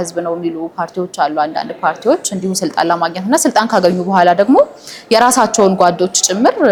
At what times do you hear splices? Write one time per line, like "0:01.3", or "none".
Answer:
none

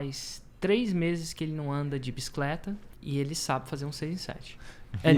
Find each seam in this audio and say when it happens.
0:02.9

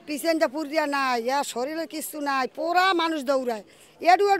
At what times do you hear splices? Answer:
none

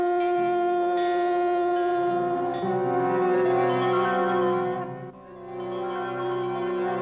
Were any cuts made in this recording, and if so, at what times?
0:02.5
0:04.5

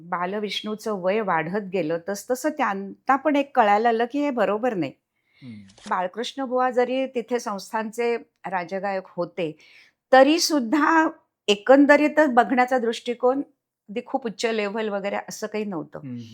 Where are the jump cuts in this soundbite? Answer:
0:05.9

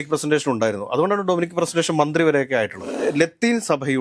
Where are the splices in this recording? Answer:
0:02.9

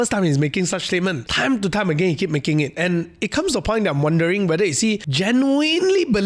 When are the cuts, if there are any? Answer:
0:01.3
0:05.1

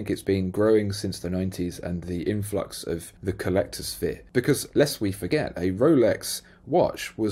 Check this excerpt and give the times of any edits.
0:03.1
0:04.2

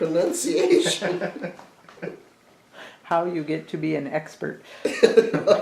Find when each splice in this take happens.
none

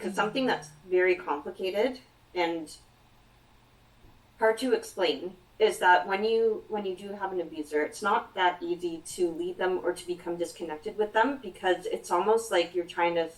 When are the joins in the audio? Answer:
none

